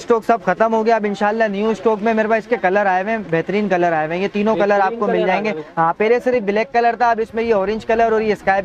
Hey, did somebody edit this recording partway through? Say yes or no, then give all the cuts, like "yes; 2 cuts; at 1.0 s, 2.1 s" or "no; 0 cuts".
no; 0 cuts